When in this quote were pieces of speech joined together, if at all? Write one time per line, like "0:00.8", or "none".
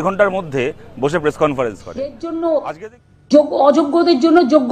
0:02.2